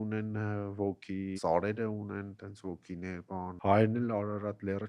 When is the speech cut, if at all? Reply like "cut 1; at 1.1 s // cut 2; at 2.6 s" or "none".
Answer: cut 1; at 1.4 s // cut 2; at 3.5 s